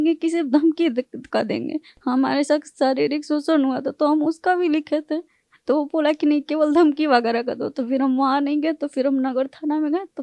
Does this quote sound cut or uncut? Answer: uncut